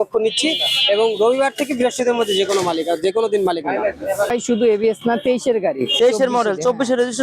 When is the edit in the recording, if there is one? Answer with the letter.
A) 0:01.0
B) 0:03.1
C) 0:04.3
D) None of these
C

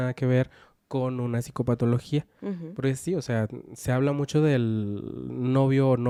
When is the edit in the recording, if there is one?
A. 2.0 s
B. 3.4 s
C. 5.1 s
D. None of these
D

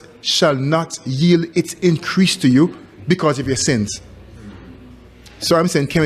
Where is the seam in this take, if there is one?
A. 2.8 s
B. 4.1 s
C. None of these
C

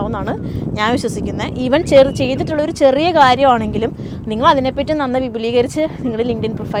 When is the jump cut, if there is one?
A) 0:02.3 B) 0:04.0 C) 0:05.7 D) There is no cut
D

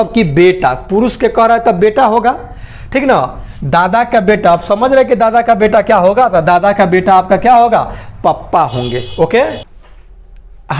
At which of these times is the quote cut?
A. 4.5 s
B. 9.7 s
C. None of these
B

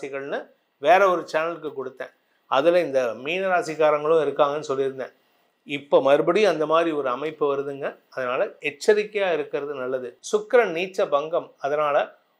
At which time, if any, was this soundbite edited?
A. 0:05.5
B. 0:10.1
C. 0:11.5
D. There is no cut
B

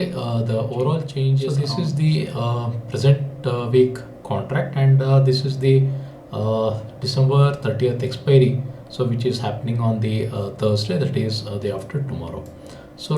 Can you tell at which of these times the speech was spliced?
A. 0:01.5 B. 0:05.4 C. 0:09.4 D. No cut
A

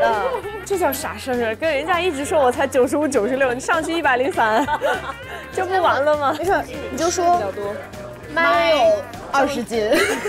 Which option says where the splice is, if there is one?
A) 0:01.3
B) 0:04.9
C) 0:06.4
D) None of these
C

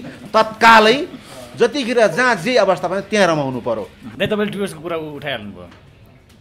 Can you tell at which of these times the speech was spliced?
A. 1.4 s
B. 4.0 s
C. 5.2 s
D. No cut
B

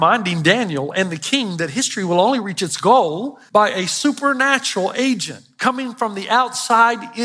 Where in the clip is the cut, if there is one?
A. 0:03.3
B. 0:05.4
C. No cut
A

